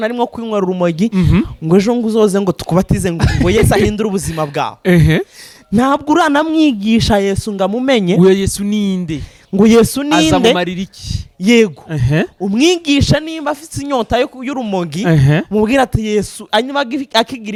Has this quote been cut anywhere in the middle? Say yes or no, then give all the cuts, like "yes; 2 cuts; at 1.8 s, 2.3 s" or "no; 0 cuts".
no; 0 cuts